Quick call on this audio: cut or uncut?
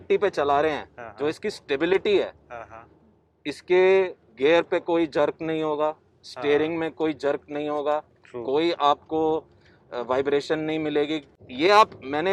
uncut